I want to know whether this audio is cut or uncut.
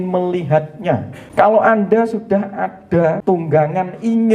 cut